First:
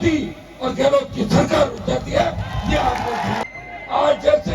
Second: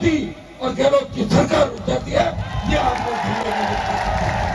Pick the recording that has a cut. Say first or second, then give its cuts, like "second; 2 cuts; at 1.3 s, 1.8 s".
first; 1 cut; at 3.4 s